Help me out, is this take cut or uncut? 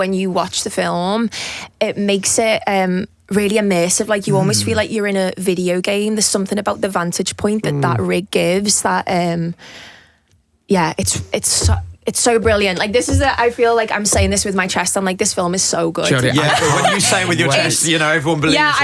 uncut